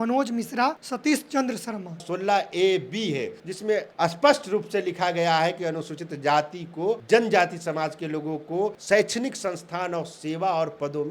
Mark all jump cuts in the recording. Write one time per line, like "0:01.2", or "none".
0:00.9
0:02.1
0:03.6
0:07.0
0:08.8